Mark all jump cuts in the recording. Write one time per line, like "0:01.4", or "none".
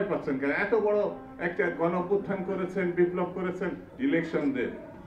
0:03.9